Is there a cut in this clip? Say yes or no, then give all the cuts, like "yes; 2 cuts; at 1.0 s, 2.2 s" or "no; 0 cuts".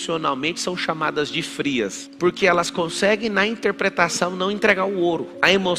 yes; 1 cut; at 2.0 s